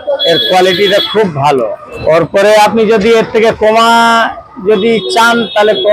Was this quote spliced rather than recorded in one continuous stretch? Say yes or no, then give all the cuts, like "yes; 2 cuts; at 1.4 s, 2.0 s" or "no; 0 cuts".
yes; 1 cut; at 2.0 s